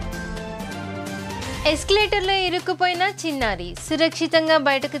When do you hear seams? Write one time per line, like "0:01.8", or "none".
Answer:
0:00.9